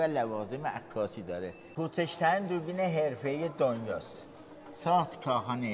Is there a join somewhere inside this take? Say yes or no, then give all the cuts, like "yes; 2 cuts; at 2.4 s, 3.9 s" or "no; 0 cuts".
yes; 1 cut; at 1.6 s